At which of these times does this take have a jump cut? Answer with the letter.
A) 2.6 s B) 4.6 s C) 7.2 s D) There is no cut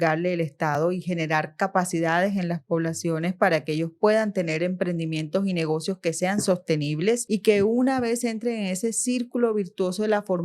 C